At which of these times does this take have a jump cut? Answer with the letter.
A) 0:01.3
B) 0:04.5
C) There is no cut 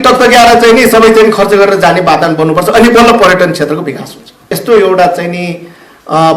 B